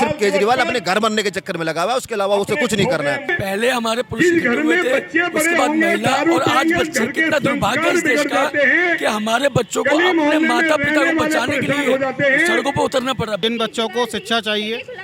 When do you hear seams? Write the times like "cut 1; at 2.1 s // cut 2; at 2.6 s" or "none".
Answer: cut 1; at 3.3 s // cut 2; at 13.4 s